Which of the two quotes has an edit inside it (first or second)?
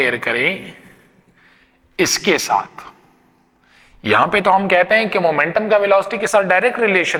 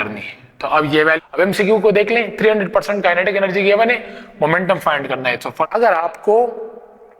second